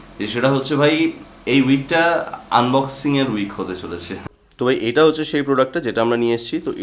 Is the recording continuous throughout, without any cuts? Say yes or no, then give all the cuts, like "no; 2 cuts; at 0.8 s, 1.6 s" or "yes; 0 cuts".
no; 1 cut; at 4.4 s